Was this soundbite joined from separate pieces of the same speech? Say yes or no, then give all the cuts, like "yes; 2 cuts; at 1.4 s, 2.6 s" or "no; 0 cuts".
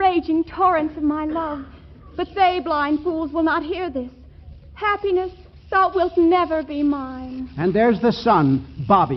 no; 0 cuts